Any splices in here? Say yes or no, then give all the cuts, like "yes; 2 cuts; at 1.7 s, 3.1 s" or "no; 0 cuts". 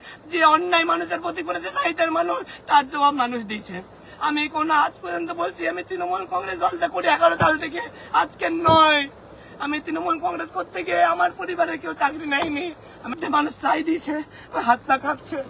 yes; 1 cut; at 13.2 s